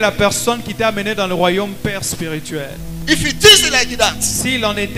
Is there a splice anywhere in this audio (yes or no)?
no